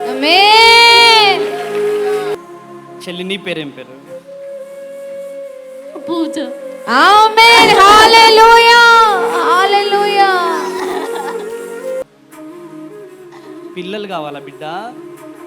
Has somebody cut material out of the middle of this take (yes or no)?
yes